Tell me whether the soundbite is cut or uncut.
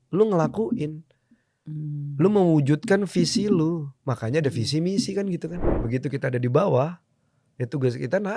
cut